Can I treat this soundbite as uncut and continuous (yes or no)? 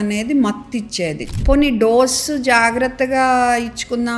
no